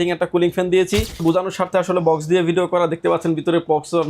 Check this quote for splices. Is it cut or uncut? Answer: cut